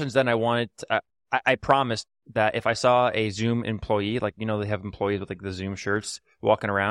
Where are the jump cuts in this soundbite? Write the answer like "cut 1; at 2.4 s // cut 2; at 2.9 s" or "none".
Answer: none